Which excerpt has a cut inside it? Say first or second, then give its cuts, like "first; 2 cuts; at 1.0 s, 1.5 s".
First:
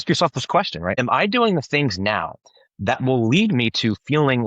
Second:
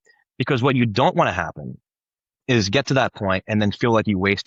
first; 2 cuts; at 0.9 s, 2.4 s